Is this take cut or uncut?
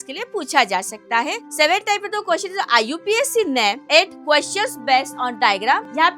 uncut